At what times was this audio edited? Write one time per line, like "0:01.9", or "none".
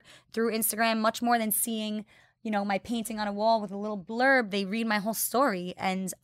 none